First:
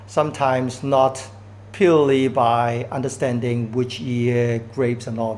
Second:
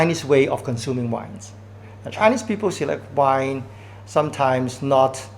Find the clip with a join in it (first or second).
second